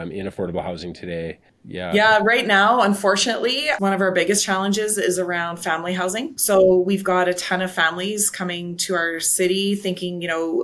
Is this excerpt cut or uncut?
cut